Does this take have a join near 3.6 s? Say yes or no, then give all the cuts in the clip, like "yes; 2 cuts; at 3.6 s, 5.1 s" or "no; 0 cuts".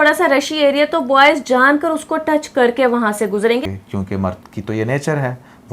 yes; 1 cut; at 3.6 s